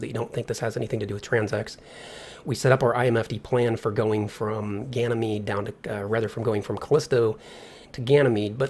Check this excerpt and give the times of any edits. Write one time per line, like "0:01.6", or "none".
0:01.8